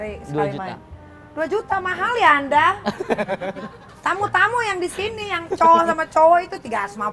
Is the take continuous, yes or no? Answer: yes